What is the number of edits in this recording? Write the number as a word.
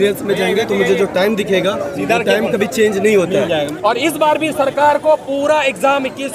one